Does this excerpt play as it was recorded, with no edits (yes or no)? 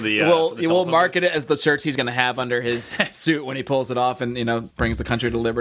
no